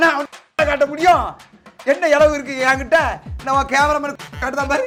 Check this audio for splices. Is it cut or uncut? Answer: uncut